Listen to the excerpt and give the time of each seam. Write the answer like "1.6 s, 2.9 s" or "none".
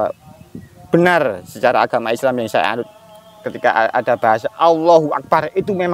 none